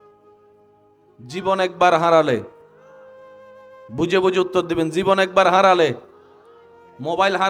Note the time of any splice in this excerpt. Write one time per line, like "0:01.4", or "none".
0:01.1